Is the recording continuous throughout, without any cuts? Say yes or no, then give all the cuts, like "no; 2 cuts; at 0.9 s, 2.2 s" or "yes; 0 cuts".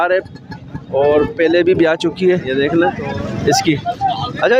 no; 1 cut; at 2.5 s